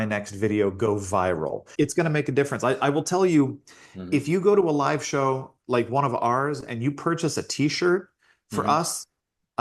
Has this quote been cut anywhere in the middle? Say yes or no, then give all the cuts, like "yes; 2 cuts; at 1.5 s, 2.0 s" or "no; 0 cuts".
yes; 1 cut; at 1.7 s